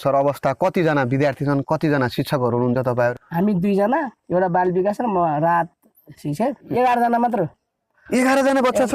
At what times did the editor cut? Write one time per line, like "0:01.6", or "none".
0:04.2
0:06.7